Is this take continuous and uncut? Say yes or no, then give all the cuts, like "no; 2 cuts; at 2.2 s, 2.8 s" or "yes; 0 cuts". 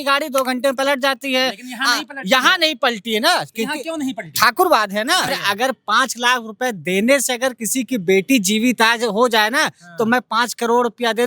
no; 1 cut; at 5.4 s